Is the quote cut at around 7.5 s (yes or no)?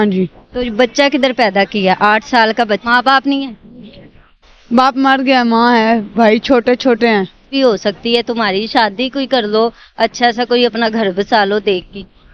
yes